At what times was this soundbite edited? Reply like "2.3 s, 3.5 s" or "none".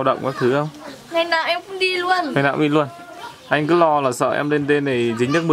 none

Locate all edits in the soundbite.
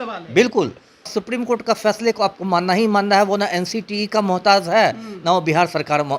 1.1 s

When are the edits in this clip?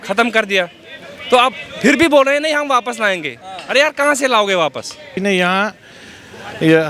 5.1 s

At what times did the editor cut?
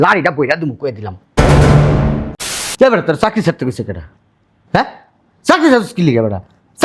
2.6 s

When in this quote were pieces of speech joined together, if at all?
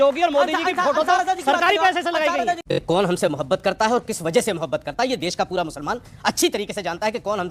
2.8 s

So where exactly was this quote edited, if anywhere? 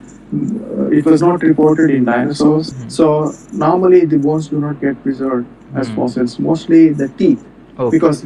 2.7 s

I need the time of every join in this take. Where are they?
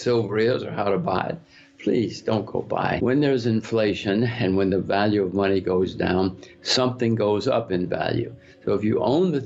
3.0 s

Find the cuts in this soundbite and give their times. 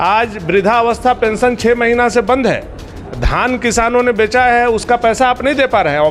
none

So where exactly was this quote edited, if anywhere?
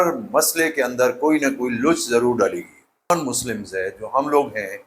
3.1 s

